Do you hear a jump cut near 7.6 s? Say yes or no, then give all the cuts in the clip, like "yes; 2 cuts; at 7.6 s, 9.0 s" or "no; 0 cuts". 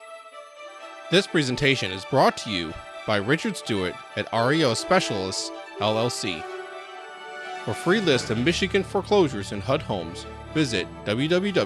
no; 1 cut; at 1.1 s